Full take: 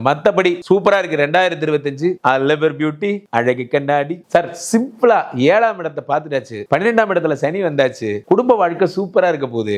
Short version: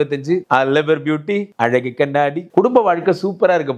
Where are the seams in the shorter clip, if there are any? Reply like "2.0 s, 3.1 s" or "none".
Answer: 2.5 s